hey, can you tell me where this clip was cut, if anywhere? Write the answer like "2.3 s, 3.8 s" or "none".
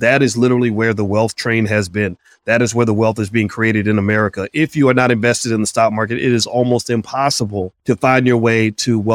7.7 s